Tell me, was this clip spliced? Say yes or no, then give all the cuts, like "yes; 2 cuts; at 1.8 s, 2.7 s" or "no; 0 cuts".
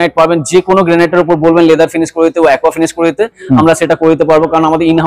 no; 0 cuts